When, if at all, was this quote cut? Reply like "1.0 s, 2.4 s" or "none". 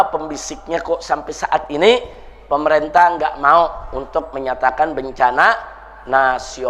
none